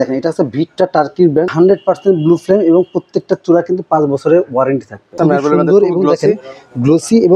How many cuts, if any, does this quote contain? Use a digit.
2